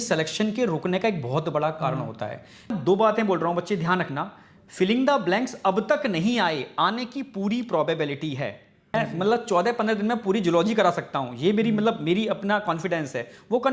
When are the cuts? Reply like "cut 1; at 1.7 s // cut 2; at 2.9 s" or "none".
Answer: cut 1; at 2.7 s // cut 2; at 8.9 s